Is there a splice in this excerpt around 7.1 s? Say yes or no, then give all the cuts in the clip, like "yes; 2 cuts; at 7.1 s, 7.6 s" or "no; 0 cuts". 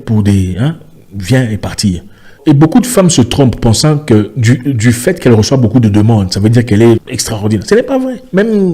yes; 2 cuts; at 2.4 s, 7.1 s